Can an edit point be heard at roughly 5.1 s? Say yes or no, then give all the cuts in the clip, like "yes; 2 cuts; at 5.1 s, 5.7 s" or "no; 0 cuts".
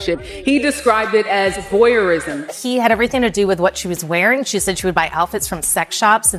no; 1 cut; at 2.5 s